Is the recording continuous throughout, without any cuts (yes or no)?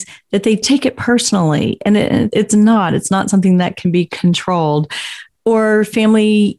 yes